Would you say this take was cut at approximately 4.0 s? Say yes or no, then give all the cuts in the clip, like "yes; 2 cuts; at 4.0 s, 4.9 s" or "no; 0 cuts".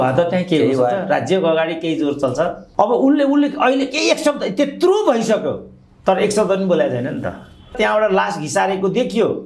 no; 2 cuts; at 2.6 s, 7.7 s